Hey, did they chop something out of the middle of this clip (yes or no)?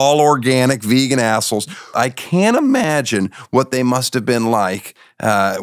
yes